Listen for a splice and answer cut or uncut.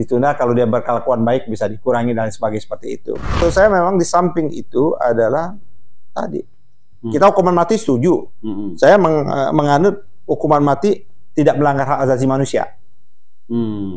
cut